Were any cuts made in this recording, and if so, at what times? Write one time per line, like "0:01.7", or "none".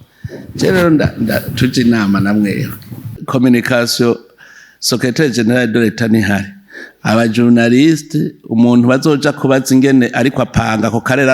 0:03.2